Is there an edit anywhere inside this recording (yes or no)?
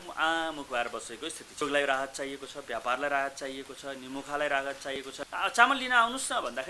yes